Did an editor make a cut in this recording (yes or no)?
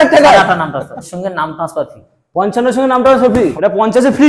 yes